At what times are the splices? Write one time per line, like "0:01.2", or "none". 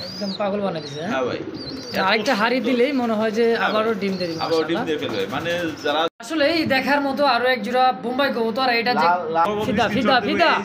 0:06.1
0:09.5